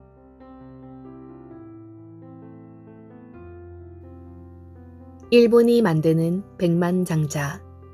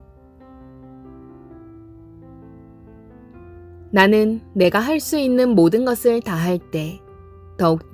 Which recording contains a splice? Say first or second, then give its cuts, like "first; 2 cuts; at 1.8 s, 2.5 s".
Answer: second; 1 cut; at 3.9 s